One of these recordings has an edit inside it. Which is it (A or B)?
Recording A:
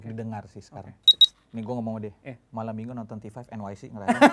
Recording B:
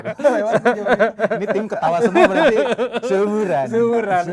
A